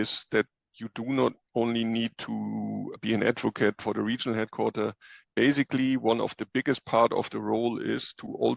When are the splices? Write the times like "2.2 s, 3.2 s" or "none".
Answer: 2.9 s, 3.8 s